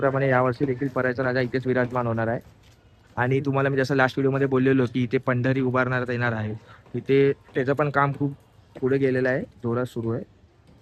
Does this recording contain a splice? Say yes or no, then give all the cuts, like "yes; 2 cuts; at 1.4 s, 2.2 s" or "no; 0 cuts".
no; 0 cuts